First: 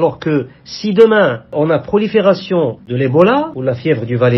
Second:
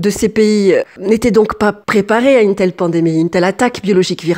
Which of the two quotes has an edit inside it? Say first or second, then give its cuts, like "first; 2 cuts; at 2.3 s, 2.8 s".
first; 3 cuts; at 1.5 s, 2.8 s, 3.5 s